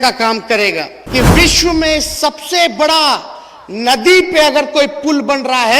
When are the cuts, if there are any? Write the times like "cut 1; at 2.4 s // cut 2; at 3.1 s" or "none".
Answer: cut 1; at 0.9 s